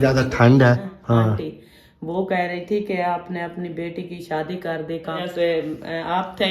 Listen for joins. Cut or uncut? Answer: cut